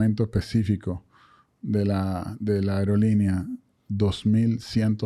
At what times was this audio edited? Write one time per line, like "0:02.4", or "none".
none